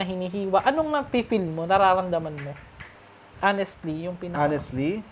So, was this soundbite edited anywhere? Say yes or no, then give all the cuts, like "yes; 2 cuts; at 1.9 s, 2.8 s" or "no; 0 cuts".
no; 0 cuts